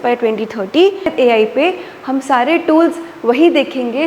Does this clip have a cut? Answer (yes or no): yes